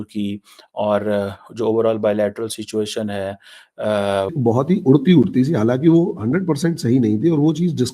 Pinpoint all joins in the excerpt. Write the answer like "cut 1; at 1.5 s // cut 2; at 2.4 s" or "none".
cut 1; at 4.3 s